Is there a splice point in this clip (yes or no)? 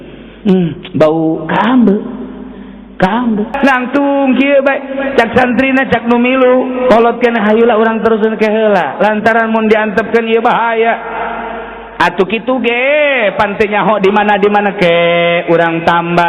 yes